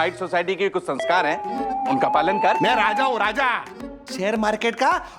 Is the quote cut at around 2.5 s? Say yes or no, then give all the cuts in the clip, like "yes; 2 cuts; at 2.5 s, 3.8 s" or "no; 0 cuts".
yes; 1 cut; at 2.5 s